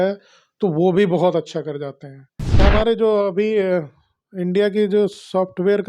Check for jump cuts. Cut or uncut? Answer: cut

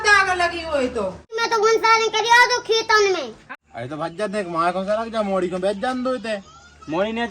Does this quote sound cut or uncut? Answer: cut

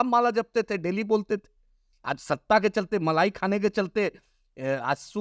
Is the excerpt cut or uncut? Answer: uncut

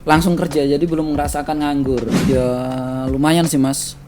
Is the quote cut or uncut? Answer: cut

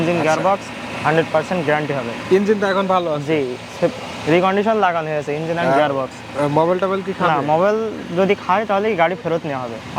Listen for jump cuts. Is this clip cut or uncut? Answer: uncut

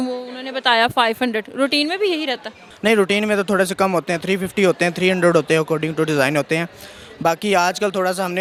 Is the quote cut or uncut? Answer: uncut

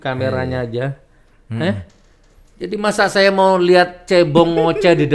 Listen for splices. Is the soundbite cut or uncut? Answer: uncut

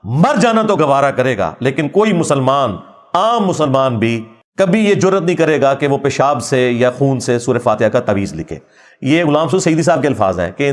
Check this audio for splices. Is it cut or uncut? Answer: uncut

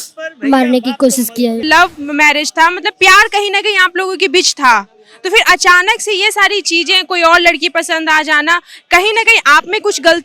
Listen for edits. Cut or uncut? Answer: cut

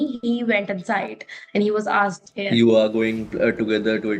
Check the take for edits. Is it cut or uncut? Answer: cut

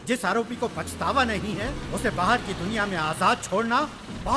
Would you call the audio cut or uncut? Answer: uncut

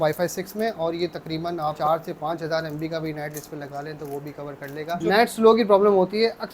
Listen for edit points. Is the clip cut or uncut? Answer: cut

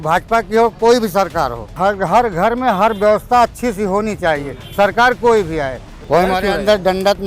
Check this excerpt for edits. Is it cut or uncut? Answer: cut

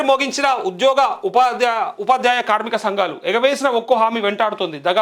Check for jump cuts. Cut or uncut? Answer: uncut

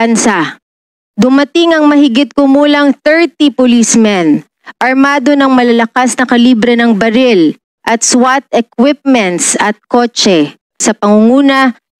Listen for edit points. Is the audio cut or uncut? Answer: cut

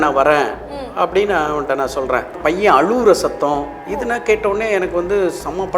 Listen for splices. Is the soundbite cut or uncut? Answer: cut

